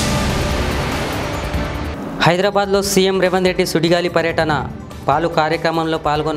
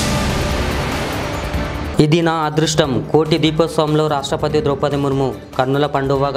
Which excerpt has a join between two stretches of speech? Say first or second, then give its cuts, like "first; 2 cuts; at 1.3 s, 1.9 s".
second; 1 cut; at 1.9 s